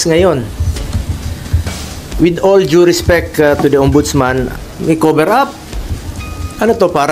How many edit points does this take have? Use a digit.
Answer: 1